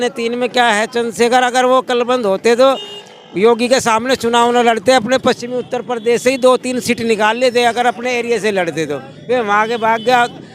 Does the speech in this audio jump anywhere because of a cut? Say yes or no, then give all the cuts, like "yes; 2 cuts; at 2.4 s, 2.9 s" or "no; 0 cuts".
no; 0 cuts